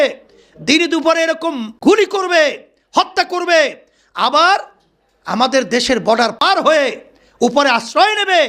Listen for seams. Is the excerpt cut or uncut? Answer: cut